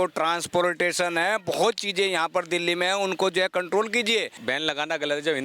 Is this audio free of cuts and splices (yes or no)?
no